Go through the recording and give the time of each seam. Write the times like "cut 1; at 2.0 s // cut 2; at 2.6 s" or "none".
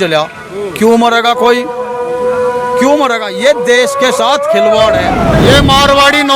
cut 1; at 5.3 s

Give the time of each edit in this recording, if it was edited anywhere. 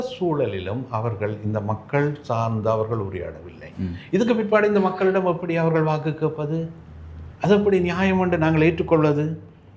none

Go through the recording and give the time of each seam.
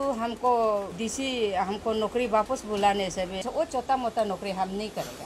cut 1; at 0.9 s // cut 2; at 3.5 s

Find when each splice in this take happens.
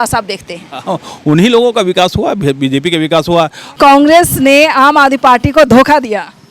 cut 1; at 3.6 s

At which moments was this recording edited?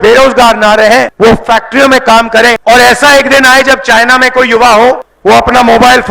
cut 1; at 1.1 s // cut 2; at 2.6 s // cut 3; at 5.1 s

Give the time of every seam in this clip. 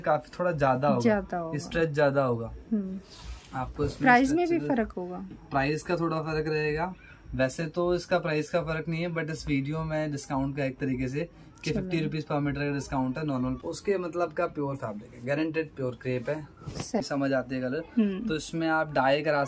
cut 1; at 13.6 s // cut 2; at 17.0 s

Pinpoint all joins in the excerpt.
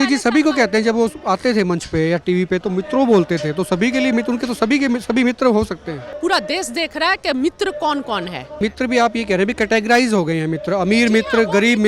cut 1; at 6.1 s // cut 2; at 8.5 s

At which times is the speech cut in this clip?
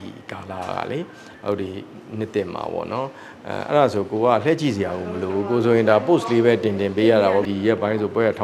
cut 1; at 7.5 s

